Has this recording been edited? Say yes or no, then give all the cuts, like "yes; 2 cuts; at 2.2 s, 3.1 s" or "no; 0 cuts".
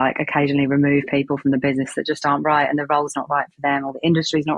no; 0 cuts